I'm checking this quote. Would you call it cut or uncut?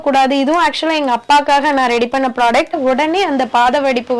cut